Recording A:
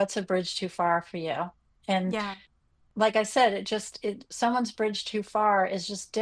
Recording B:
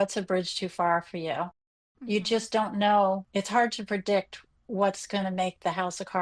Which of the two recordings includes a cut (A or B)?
B